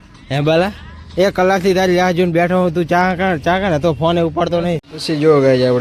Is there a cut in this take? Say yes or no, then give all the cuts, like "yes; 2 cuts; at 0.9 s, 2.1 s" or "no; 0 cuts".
yes; 1 cut; at 4.9 s